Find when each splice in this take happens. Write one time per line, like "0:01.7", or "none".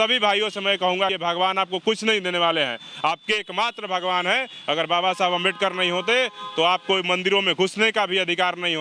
0:01.1